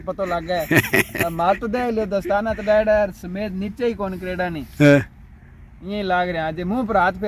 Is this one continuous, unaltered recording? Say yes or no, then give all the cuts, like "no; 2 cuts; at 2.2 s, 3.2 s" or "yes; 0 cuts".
yes; 0 cuts